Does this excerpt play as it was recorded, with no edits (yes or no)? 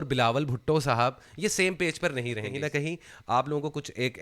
no